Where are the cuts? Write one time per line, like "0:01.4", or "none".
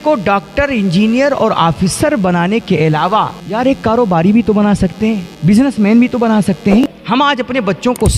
0:03.4
0:05.3
0:06.8